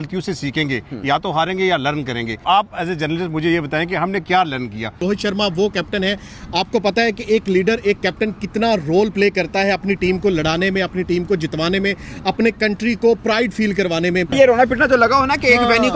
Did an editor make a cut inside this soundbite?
yes; 3 cuts; at 2.4 s, 5.0 s, 14.3 s

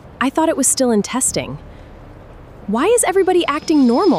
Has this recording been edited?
no; 0 cuts

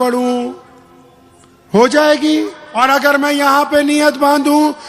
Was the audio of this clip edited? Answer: yes; 1 cut; at 2.6 s

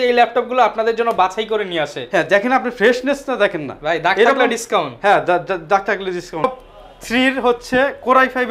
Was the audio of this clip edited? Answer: yes; 1 cut; at 6.4 s

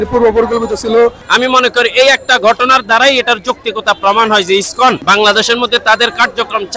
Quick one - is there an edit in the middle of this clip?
yes; 2 cuts; at 1.2 s, 5.0 s

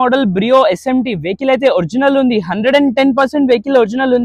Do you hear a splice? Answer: no; 0 cuts

